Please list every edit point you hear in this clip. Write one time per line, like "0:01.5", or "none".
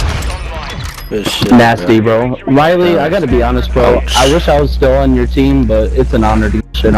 none